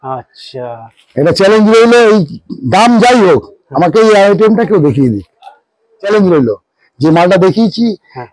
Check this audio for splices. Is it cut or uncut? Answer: cut